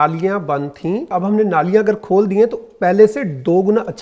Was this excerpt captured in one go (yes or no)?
no